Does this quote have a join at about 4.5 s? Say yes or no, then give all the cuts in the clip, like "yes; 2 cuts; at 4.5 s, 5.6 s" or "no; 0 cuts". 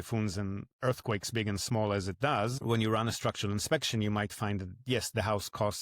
no; 1 cut; at 2.6 s